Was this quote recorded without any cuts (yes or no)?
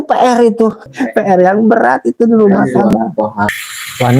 no